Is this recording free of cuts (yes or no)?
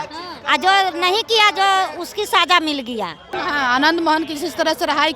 no